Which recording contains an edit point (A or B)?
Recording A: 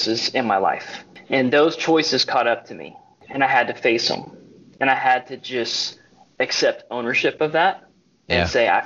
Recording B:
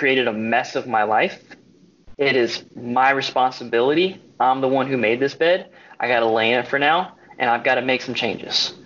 A